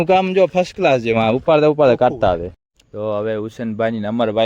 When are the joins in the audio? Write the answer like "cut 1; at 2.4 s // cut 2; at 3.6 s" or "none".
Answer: cut 1; at 2.5 s